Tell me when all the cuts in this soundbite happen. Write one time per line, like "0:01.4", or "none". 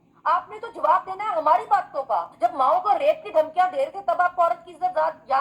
0:02.3